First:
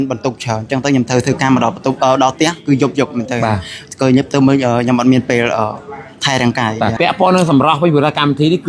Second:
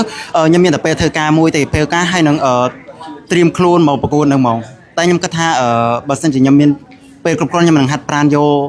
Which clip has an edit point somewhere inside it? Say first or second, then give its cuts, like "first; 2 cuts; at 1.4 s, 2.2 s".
first; 1 cut; at 6.9 s